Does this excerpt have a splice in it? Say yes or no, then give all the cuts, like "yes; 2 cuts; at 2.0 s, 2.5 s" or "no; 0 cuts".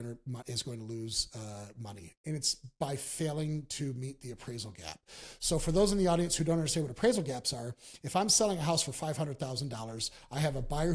no; 0 cuts